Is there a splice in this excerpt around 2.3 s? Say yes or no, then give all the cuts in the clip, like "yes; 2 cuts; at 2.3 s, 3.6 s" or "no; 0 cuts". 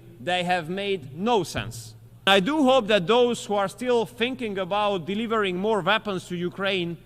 yes; 1 cut; at 2.3 s